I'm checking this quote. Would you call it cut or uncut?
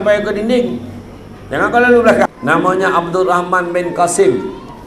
cut